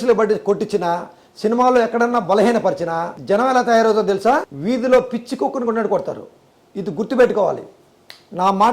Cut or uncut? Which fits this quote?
cut